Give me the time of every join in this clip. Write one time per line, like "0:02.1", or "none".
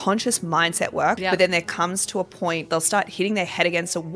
0:01.2
0:02.7